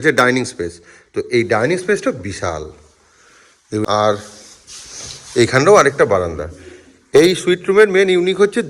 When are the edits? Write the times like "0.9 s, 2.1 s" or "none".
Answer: 3.8 s